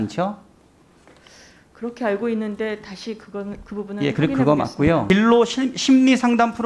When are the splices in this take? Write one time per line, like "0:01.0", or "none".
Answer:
0:05.0